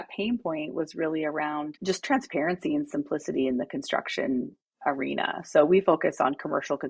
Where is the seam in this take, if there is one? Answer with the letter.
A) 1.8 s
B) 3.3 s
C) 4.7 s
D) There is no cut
A